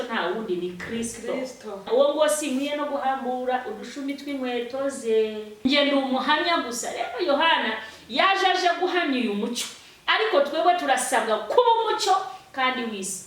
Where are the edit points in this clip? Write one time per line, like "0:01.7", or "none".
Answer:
0:01.9
0:05.5